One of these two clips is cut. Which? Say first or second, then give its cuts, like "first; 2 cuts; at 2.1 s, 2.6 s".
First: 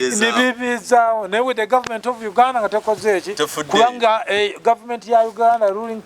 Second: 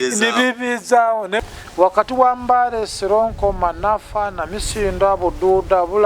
second; 1 cut; at 1.4 s